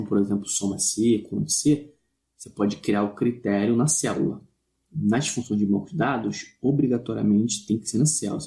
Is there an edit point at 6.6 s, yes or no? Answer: no